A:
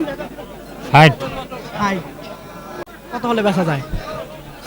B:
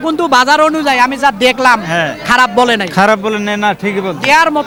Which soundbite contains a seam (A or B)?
A